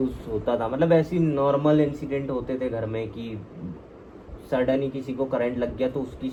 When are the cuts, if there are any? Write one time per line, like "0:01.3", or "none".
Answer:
none